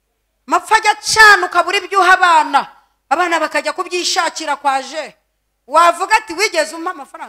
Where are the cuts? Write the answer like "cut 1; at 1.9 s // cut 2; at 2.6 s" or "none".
none

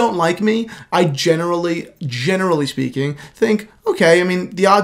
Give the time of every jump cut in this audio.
none

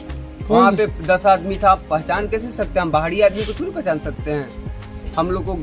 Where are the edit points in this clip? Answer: none

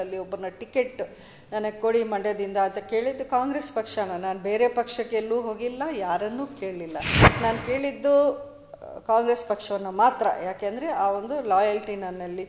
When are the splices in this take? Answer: cut 1; at 7.1 s

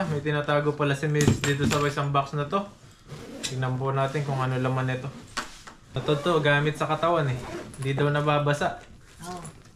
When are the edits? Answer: cut 1; at 6.0 s

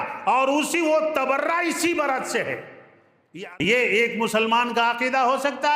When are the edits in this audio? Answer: cut 1; at 3.2 s

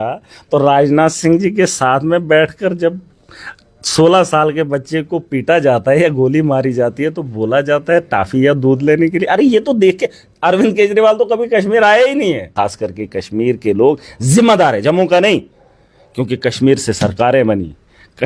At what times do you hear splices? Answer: cut 1; at 12.5 s

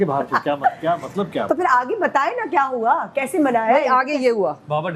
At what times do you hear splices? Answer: none

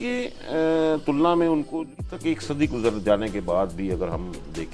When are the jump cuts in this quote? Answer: cut 1; at 1.7 s

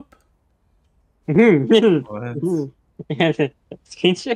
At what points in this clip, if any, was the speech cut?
none

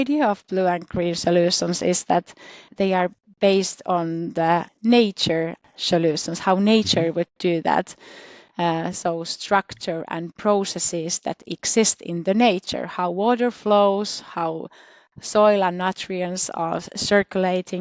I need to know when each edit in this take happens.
cut 1; at 2.7 s // cut 2; at 4.7 s // cut 3; at 5.7 s

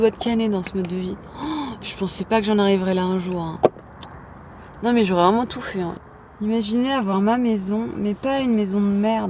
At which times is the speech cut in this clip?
cut 1; at 5.9 s

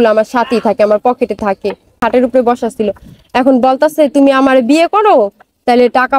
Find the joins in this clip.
cut 1; at 2.0 s

